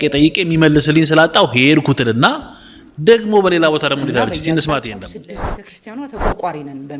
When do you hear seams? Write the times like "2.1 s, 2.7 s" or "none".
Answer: 5.3 s